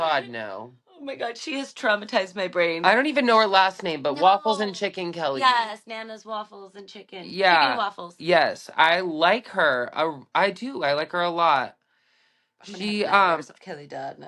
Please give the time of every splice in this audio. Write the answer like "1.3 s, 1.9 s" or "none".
none